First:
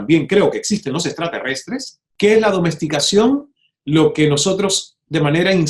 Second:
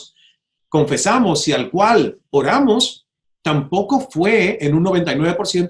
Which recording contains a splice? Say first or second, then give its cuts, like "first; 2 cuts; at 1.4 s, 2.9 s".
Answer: first; 1 cut; at 2.0 s